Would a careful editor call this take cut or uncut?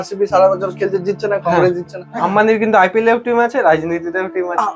cut